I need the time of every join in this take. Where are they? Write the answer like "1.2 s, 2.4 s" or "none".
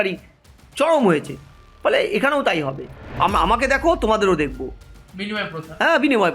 3.2 s